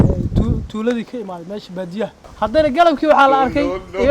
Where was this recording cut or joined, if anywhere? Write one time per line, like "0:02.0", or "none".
0:02.2